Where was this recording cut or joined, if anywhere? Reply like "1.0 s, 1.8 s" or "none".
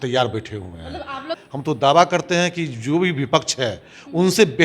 1.3 s